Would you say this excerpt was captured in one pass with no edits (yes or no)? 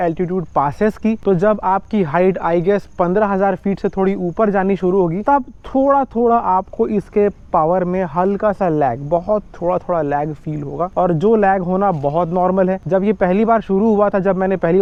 yes